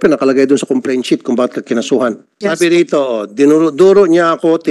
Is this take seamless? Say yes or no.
no